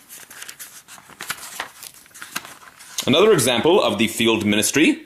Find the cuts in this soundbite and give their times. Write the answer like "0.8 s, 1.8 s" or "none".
2.3 s

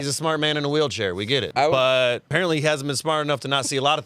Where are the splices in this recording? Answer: 1.5 s, 2.2 s

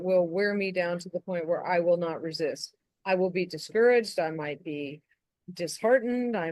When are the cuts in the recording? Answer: none

